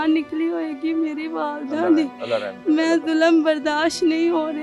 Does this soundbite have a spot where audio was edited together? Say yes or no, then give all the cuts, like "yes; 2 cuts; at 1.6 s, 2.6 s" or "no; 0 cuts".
no; 0 cuts